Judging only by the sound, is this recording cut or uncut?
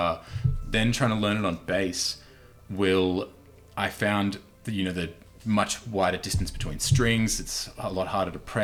uncut